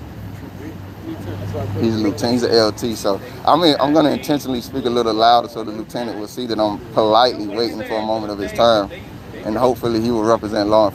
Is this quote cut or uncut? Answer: uncut